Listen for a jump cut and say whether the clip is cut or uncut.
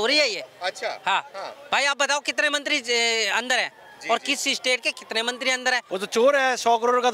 cut